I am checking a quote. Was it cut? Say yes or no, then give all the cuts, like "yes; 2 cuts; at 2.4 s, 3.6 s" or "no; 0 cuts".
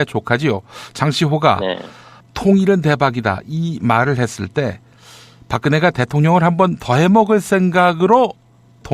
yes; 1 cut; at 6.4 s